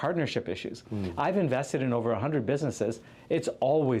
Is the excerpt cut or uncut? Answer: uncut